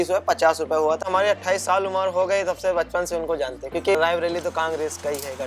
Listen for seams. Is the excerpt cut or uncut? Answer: cut